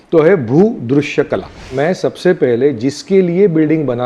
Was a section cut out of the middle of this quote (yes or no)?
yes